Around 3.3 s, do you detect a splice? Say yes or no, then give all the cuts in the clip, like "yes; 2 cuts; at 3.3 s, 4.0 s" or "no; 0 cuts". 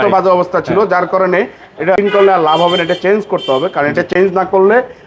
no; 1 cut; at 2.0 s